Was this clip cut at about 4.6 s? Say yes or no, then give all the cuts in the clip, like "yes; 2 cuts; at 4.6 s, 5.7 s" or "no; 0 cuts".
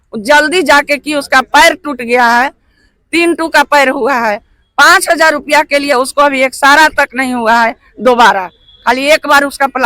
no; 0 cuts